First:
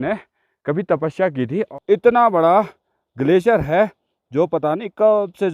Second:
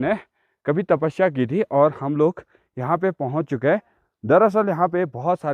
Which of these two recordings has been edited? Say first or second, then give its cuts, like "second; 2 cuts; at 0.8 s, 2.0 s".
first; 1 cut; at 1.7 s